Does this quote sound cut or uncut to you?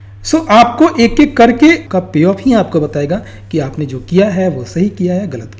cut